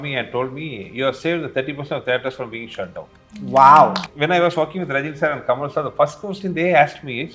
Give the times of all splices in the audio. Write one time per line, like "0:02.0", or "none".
0:04.0

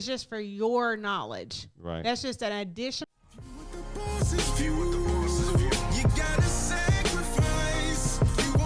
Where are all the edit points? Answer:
0:03.0

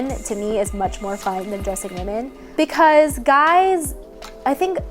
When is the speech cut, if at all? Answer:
0:02.4

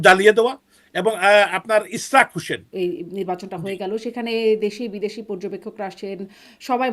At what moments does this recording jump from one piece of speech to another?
0:02.7

